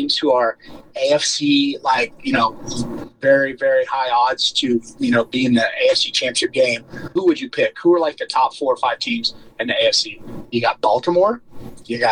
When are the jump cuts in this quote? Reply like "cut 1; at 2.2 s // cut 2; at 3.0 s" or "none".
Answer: cut 1; at 7.1 s // cut 2; at 10.4 s